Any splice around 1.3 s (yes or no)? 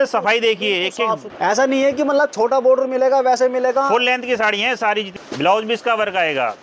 yes